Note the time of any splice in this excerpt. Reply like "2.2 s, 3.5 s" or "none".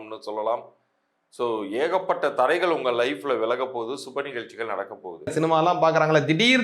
5.3 s